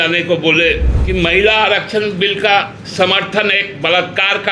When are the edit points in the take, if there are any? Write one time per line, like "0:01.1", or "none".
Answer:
0:00.9
0:02.8